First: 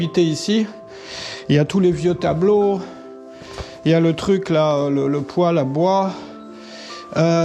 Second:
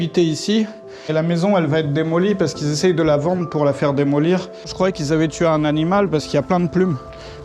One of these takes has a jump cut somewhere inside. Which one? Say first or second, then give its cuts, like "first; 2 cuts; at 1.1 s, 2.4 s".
second; 2 cuts; at 1.1 s, 4.7 s